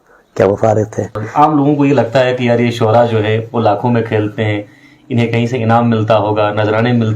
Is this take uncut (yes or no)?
no